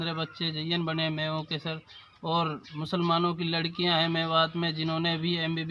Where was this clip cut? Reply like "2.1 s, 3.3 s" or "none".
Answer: none